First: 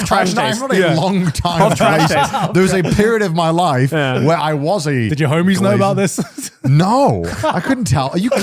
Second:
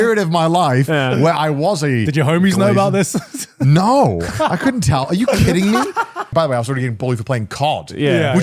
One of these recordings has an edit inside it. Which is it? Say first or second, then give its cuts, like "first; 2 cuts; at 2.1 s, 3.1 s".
second; 1 cut; at 6.3 s